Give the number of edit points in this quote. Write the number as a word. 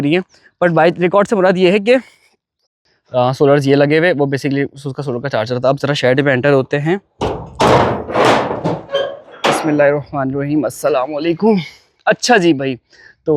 one